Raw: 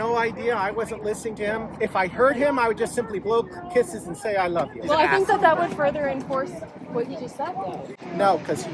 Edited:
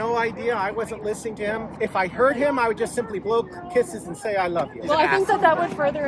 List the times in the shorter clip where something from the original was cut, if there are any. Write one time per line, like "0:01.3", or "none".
none